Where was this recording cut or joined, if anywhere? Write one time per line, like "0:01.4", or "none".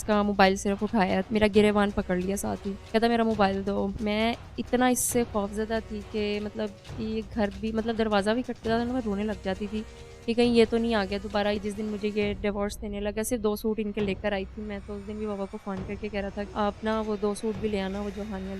0:01.2
0:02.7
0:04.0
0:11.6
0:16.5